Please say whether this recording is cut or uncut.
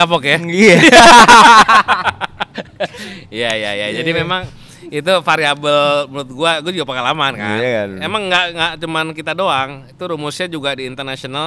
uncut